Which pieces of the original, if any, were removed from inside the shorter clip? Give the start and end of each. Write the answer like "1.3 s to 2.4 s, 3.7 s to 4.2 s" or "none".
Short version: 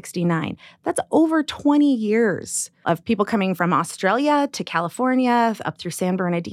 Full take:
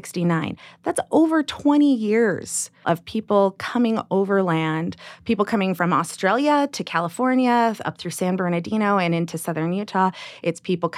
3.0 s to 5.2 s